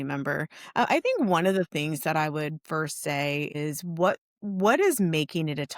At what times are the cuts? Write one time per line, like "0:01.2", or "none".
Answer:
0:03.5